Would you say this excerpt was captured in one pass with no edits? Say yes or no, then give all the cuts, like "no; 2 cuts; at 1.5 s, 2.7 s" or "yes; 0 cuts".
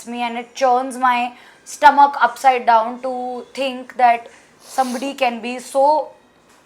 yes; 0 cuts